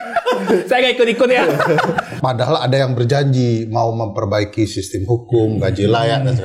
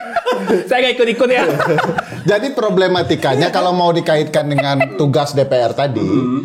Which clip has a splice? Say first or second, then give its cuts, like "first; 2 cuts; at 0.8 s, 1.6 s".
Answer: first; 1 cut; at 2.2 s